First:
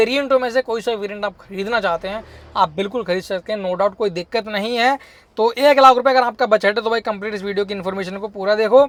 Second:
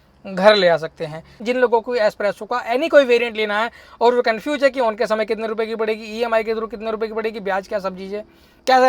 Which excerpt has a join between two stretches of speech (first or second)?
second